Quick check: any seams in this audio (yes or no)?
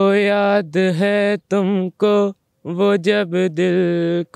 no